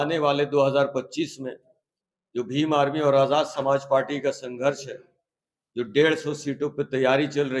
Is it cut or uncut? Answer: uncut